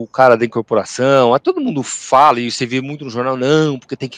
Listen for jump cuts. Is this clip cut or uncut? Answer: cut